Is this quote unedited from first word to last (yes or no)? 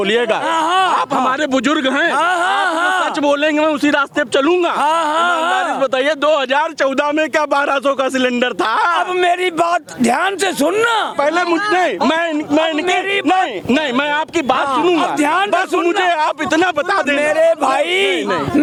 yes